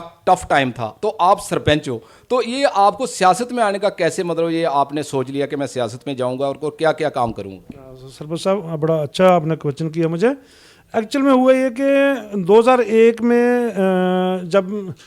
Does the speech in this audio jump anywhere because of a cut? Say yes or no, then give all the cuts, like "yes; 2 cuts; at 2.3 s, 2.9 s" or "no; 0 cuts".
no; 0 cuts